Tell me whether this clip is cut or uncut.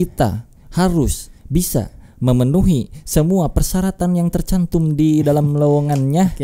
uncut